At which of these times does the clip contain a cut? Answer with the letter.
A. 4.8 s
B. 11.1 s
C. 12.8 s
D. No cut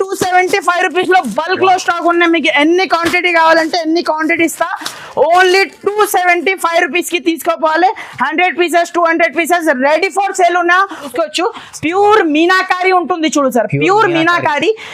B